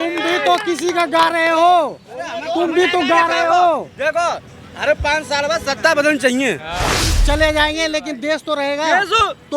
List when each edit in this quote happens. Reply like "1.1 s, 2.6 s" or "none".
7.1 s